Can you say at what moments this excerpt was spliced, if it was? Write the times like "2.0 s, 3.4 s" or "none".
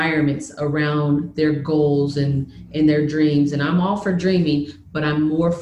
none

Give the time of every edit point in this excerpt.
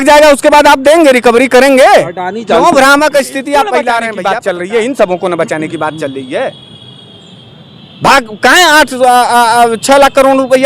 4.1 s

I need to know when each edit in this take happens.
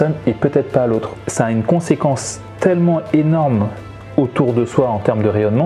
1.2 s

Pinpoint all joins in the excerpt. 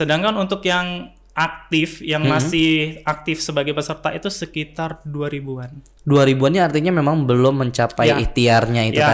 none

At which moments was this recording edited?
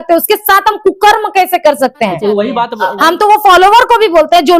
2.7 s

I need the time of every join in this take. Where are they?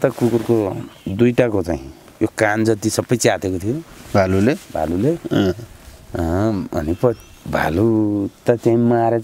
none

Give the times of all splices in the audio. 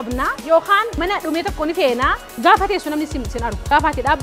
2.3 s

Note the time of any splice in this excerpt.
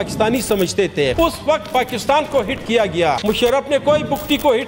1.1 s, 3.2 s

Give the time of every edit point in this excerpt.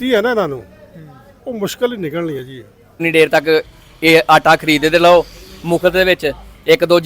3.0 s

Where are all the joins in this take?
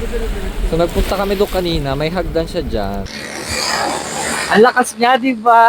3.1 s

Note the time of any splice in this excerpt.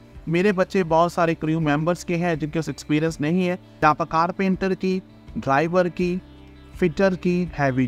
3.7 s

